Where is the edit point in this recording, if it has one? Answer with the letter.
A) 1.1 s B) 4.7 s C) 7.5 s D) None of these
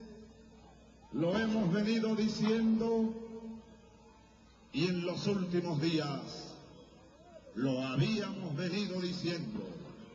A